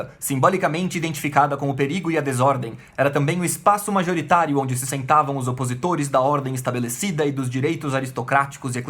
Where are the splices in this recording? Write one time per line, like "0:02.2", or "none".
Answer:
none